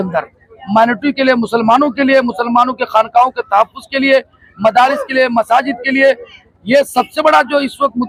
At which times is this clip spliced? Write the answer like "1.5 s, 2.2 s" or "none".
none